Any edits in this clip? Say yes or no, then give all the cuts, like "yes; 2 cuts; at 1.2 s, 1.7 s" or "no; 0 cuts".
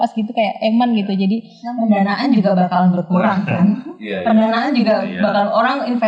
yes; 1 cut; at 1.6 s